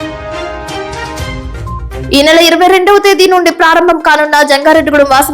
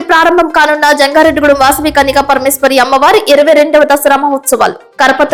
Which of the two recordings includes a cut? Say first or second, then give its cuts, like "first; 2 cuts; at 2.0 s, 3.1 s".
first; 1 cut; at 1.1 s